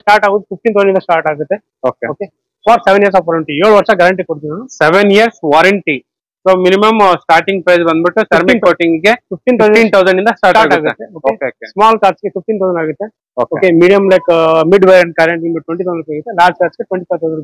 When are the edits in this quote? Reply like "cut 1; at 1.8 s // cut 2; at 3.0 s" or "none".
none